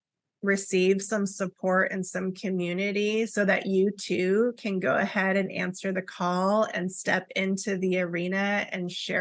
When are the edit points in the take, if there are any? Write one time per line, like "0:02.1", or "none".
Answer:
none